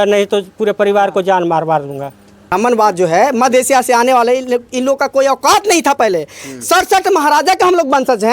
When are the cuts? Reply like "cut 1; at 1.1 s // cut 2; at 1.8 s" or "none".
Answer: cut 1; at 2.4 s